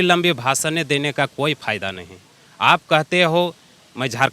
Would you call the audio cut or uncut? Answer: uncut